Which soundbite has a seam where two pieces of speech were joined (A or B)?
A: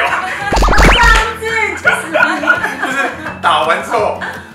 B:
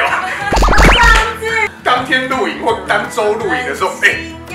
B